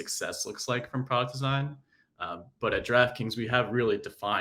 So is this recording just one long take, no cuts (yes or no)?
yes